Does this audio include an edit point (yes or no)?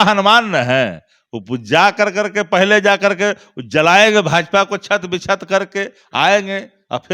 no